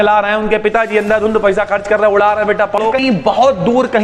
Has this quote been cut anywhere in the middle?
yes; 1 cut; at 2.8 s

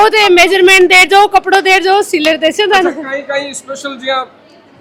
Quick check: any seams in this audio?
no; 0 cuts

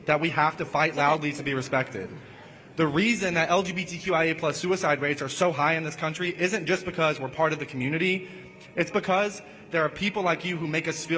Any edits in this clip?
no; 0 cuts

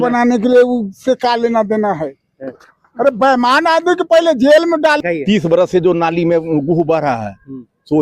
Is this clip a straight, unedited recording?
no; 1 cut; at 5.0 s

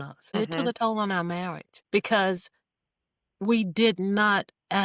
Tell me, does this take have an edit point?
yes; 1 cut; at 1.8 s

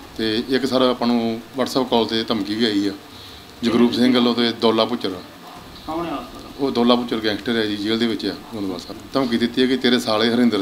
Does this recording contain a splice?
yes; 1 cut; at 8.9 s

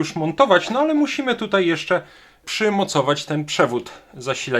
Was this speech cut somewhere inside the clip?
yes; 1 cut; at 2.4 s

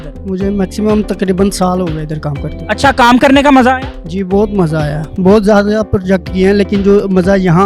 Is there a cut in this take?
no; 0 cuts

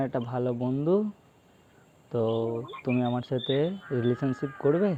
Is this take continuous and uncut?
yes; 0 cuts

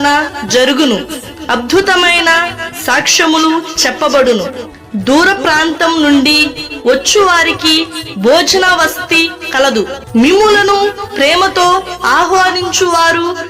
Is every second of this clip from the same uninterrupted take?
no; 1 cut; at 4.2 s

